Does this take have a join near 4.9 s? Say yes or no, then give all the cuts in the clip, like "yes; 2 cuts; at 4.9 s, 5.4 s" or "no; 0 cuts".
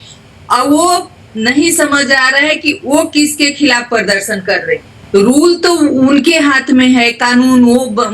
yes; 1 cut; at 4.9 s